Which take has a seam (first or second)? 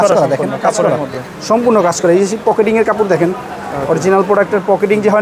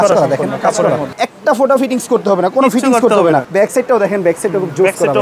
second